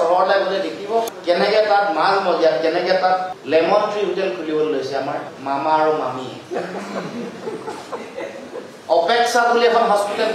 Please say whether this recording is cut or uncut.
uncut